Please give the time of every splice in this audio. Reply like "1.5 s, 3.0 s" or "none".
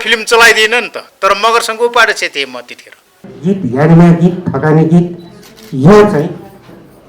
3.3 s